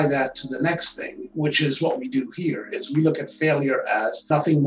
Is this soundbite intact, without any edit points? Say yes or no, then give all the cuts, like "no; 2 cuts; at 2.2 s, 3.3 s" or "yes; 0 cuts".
yes; 0 cuts